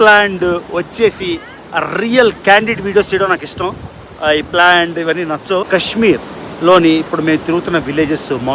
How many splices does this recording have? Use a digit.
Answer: 1